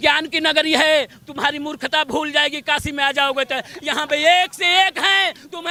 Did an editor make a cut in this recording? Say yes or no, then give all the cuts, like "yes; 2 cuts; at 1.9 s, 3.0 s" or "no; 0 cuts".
no; 0 cuts